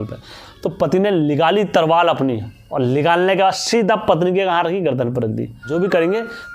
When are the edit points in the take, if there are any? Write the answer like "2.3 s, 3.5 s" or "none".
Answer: 5.6 s